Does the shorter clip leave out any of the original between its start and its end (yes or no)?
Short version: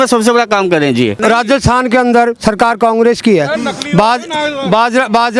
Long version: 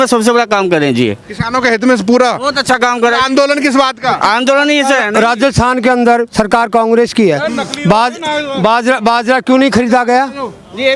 yes